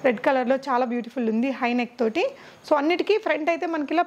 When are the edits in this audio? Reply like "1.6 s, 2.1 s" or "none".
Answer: none